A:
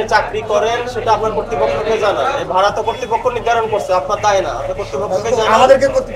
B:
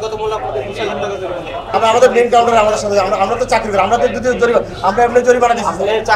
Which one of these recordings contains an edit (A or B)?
B